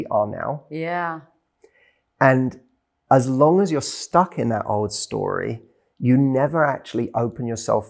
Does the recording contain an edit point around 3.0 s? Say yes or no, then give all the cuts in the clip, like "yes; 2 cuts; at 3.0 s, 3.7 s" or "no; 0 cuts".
no; 0 cuts